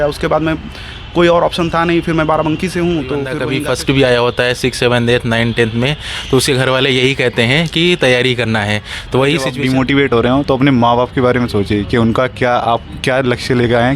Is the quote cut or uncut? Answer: cut